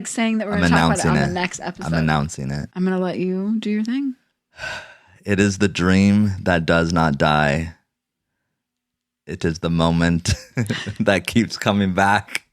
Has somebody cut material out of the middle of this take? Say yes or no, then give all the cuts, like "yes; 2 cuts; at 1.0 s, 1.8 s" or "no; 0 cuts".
yes; 1 cut; at 2.7 s